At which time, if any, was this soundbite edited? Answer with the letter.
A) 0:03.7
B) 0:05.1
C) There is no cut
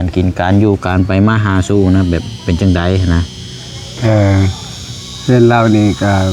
C